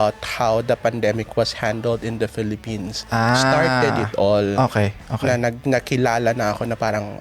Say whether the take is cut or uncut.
uncut